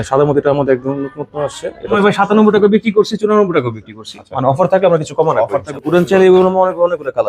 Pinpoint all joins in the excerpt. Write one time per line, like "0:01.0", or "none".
0:02.0
0:05.7

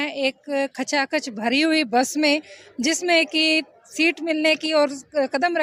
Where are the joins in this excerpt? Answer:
none

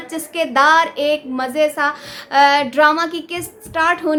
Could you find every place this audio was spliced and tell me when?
none

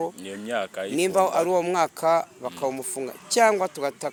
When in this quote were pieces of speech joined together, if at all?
none

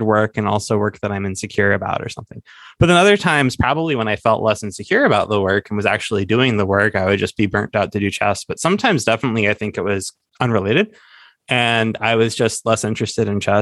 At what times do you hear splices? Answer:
none

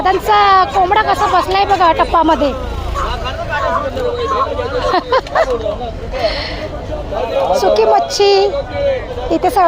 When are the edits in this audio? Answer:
none

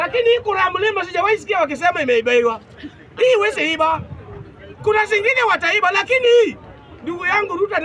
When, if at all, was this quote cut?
none

